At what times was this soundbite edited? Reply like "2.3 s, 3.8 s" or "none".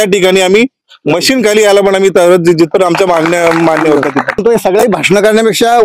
4.4 s